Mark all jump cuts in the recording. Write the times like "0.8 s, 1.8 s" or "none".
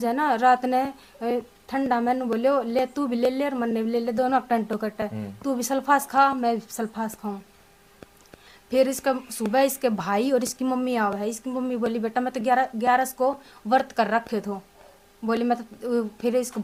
none